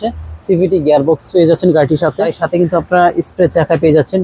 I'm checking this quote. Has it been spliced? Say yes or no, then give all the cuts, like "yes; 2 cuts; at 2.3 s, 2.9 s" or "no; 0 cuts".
yes; 1 cut; at 2.4 s